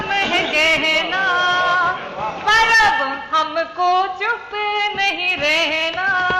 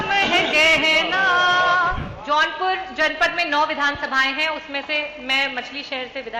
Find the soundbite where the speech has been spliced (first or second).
second